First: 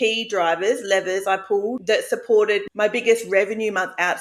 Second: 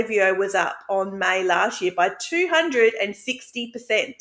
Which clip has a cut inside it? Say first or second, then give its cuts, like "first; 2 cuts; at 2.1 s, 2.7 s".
first; 2 cuts; at 1.8 s, 2.7 s